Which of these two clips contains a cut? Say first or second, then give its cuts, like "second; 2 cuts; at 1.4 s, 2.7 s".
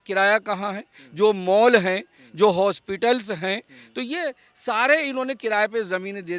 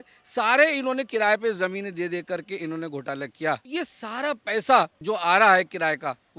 second; 2 cuts; at 3.7 s, 5.0 s